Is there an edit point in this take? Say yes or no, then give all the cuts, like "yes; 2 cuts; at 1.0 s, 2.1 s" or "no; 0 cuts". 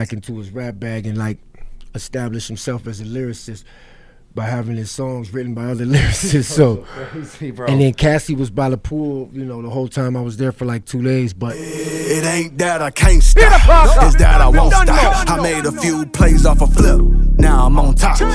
yes; 1 cut; at 11.6 s